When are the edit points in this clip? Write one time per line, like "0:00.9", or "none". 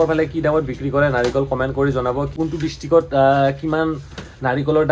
0:02.3